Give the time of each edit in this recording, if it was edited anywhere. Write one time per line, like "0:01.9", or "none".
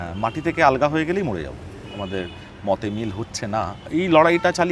0:01.8